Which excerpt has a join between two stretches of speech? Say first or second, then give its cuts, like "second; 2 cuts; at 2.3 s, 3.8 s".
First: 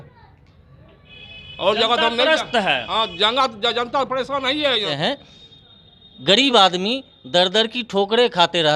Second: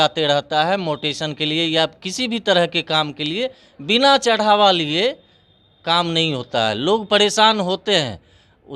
first; 1 cut; at 4.9 s